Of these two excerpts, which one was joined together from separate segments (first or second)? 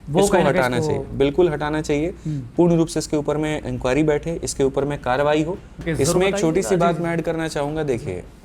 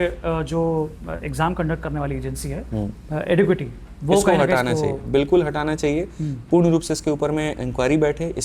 first